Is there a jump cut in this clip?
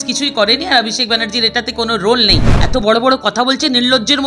yes; 1 cut; at 2.5 s

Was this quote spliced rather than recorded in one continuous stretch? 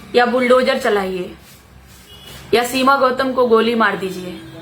no; 0 cuts

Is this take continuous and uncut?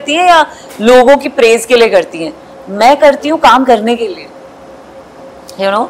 yes; 0 cuts

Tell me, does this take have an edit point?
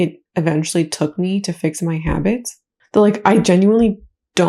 no; 0 cuts

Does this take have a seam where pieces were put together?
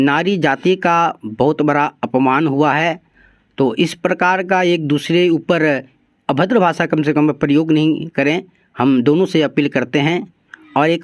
no; 0 cuts

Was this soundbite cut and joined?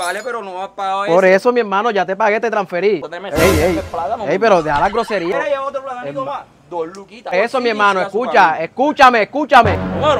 yes; 2 cuts; at 3.1 s, 5.3 s

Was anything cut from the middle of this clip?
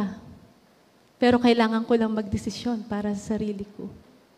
no; 0 cuts

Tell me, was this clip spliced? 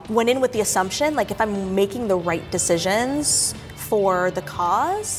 no; 0 cuts

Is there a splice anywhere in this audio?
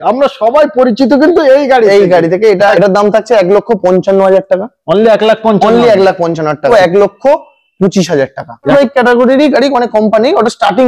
yes; 3 cuts; at 2.7 s, 6.7 s, 8.7 s

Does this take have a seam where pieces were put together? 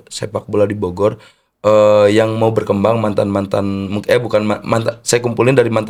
no; 0 cuts

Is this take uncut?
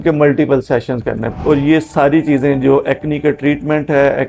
no; 1 cut; at 1.4 s

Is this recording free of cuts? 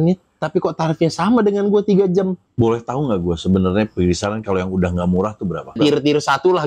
no; 2 cuts; at 2.4 s, 5.7 s

